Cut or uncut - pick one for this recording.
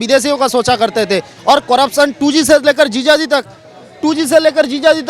uncut